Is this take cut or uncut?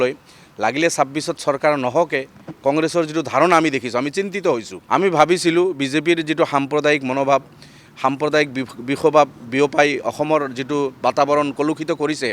cut